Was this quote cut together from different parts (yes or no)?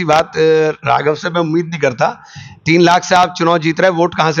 no